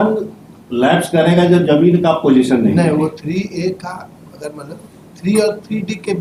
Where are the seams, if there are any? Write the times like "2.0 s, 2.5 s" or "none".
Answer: none